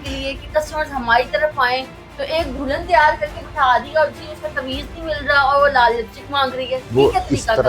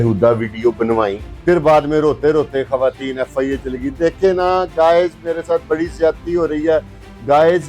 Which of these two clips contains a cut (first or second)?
second